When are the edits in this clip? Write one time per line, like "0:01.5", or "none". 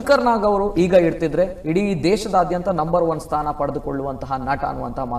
none